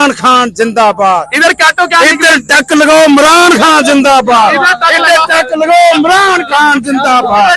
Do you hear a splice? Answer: no; 0 cuts

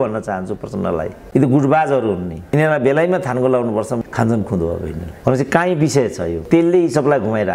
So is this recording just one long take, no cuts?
no; 5 cuts; at 1.2 s, 2.4 s, 4.0 s, 5.1 s, 6.4 s

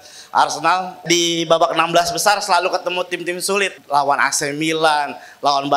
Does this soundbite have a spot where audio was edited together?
yes; 2 cuts; at 1.1 s, 3.8 s

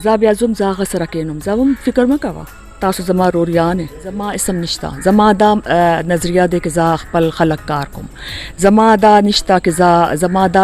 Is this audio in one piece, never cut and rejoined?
no; 1 cut; at 4.4 s

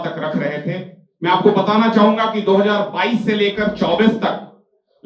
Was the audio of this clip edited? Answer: no; 0 cuts

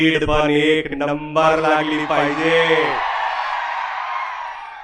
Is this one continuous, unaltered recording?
yes; 0 cuts

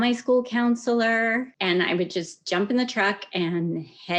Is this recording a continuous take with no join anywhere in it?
no; 1 cut; at 1.5 s

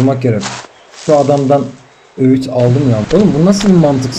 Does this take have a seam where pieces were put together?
yes; 1 cut; at 3.1 s

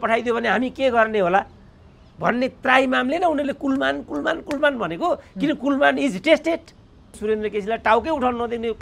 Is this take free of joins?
no; 1 cut; at 7.1 s

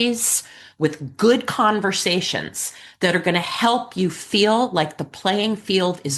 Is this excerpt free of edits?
yes; 0 cuts

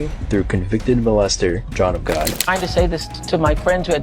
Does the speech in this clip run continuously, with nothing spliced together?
no; 1 cut; at 2.4 s

